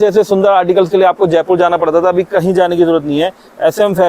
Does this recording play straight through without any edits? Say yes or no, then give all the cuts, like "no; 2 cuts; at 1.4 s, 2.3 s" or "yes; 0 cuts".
yes; 0 cuts